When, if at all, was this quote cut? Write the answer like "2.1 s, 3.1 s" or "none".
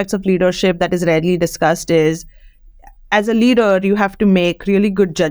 none